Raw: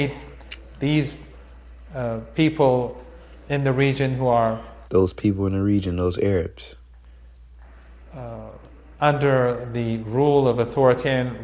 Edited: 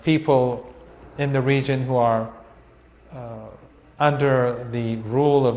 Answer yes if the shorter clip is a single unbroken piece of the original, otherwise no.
no